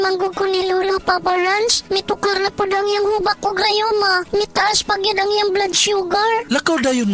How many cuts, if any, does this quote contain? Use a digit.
1